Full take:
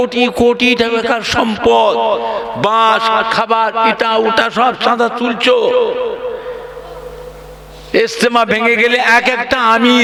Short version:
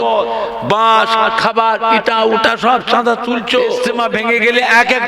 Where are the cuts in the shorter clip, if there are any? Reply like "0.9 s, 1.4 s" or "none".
3.9 s